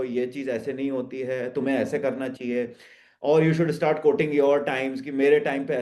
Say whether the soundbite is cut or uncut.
uncut